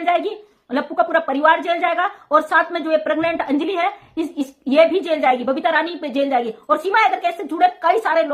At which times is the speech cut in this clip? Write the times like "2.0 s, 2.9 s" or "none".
none